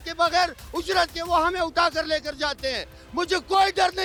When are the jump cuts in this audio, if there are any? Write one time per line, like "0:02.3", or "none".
none